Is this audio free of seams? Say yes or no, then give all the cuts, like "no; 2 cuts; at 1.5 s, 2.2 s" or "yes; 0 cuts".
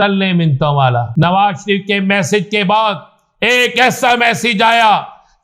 no; 1 cut; at 1.2 s